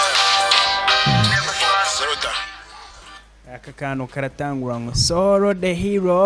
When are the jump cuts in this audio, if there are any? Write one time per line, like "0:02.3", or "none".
none

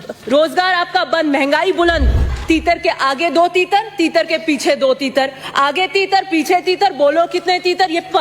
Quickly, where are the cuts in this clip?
0:02.3

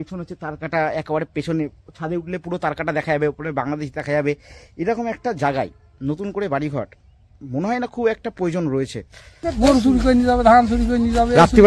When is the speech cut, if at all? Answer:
0:09.5

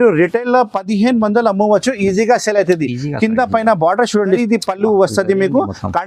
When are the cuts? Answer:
0:04.4

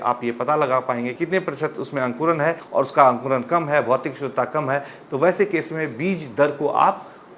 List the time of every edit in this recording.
0:01.1
0:02.6

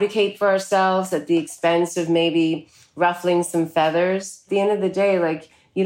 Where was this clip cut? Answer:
0:04.4

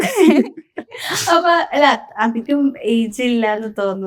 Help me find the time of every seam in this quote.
none

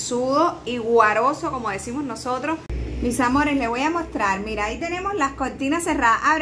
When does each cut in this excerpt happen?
0:02.8

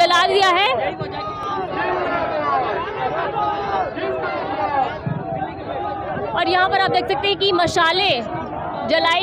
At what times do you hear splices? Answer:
none

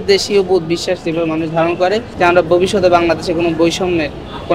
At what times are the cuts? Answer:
0:02.1

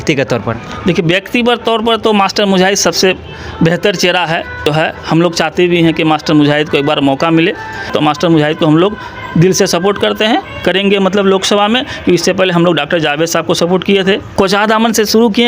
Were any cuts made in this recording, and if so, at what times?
0:04.6
0:07.9
0:14.3

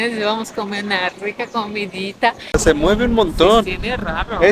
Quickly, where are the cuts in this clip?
0:02.5

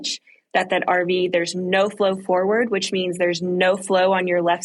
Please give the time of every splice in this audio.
none

